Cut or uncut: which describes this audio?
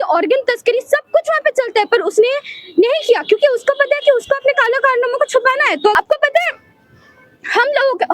cut